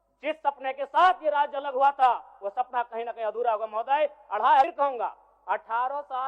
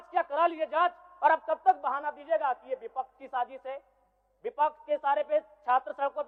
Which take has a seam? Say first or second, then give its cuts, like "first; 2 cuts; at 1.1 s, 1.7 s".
first; 1 cut; at 4.7 s